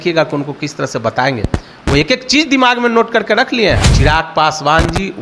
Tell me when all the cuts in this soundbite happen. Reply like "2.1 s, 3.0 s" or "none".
3.9 s